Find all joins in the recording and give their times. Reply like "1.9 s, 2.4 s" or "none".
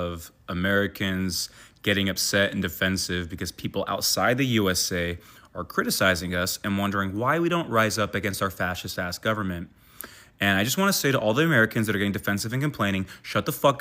none